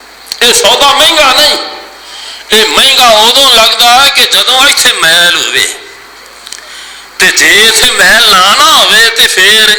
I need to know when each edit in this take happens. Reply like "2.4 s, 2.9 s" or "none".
none